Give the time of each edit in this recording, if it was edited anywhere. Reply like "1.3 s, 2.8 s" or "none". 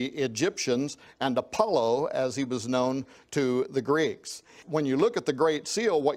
4.6 s